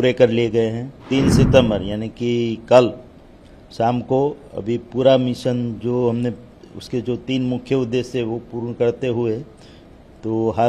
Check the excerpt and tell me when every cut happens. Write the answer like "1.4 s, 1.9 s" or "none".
0.9 s